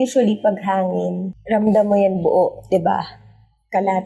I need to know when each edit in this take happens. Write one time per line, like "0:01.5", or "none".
0:01.3